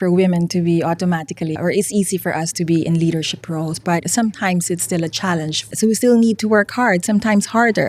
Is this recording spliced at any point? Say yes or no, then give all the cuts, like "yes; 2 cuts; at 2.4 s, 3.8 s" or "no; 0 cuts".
yes; 3 cuts; at 1.6 s, 4.1 s, 5.7 s